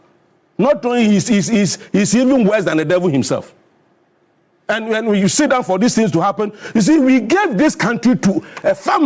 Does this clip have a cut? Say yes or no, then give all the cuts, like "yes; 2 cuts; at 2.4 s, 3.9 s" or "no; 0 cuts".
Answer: no; 0 cuts